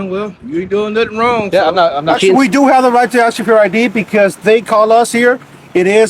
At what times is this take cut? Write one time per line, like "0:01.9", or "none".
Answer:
0:02.1